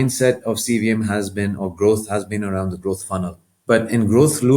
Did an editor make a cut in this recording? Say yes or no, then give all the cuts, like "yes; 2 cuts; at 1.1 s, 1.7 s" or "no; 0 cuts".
yes; 1 cut; at 3.5 s